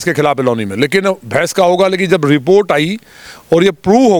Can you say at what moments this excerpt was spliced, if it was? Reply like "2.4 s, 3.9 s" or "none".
none